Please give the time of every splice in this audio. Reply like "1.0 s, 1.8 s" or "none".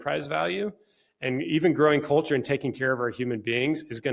none